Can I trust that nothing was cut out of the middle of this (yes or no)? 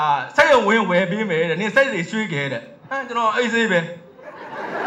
yes